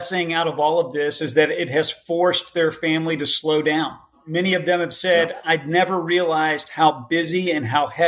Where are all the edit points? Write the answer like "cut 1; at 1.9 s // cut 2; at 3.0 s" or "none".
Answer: cut 1; at 4.2 s